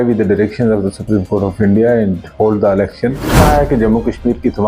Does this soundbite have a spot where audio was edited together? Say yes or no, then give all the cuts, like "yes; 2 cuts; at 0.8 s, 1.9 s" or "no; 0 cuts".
yes; 1 cut; at 3.4 s